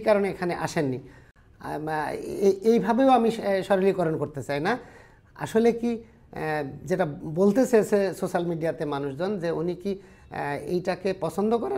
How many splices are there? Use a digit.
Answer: 0